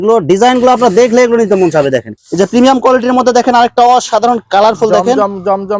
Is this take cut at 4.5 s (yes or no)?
no